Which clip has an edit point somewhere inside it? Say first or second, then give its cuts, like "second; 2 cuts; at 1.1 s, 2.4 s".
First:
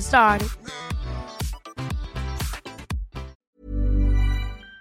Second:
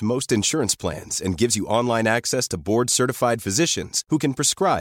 first; 1 cut; at 3.5 s